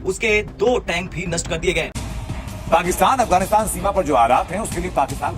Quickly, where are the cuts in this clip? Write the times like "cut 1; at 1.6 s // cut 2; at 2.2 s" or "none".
cut 1; at 2.0 s